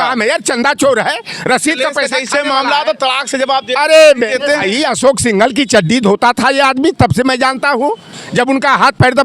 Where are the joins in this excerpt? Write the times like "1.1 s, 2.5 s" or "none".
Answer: none